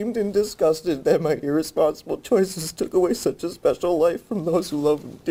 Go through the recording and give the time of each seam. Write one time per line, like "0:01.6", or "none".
none